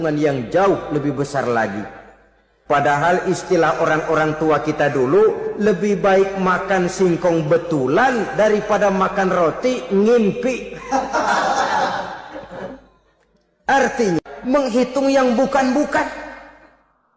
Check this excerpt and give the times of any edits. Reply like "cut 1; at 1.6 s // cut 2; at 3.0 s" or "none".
cut 1; at 14.2 s

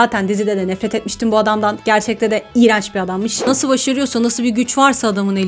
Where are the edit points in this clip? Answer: cut 1; at 3.5 s

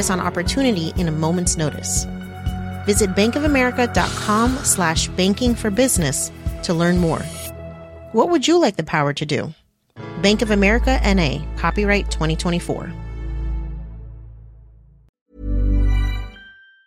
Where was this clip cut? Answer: cut 1; at 15.2 s

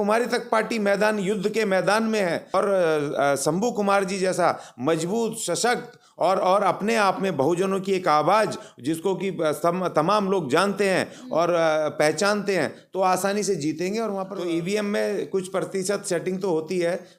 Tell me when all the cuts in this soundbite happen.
cut 1; at 2.5 s // cut 2; at 14.3 s

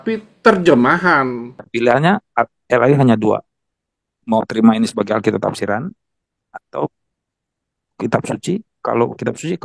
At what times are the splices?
cut 1; at 1.5 s

